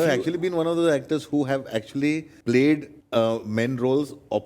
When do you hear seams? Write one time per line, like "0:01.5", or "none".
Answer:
0:02.3
0:02.9